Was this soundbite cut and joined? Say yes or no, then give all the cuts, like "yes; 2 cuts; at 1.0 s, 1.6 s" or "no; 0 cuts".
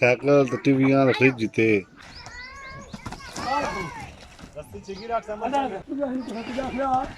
yes; 2 cuts; at 2.1 s, 5.8 s